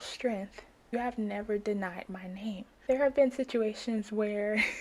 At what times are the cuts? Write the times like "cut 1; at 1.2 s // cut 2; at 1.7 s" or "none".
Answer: cut 1; at 0.9 s // cut 2; at 2.7 s